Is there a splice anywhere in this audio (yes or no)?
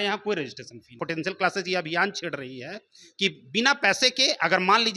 yes